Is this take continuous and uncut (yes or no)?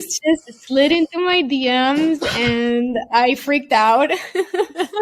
yes